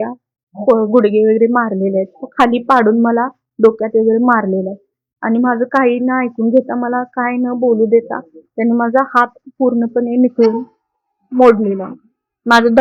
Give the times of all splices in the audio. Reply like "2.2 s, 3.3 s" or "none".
none